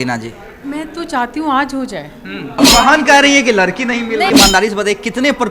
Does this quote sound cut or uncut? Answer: cut